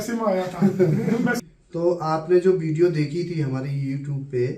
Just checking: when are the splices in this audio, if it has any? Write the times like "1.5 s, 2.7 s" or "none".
1.4 s